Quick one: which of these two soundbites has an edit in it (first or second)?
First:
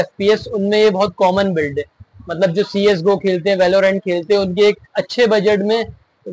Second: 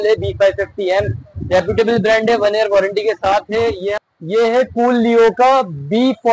second